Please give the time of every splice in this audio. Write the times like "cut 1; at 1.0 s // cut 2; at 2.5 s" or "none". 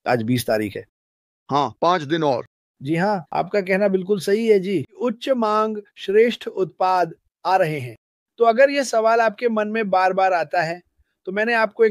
cut 1; at 4.9 s